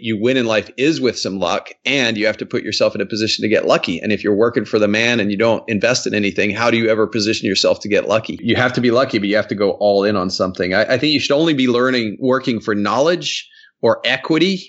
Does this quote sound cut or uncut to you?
cut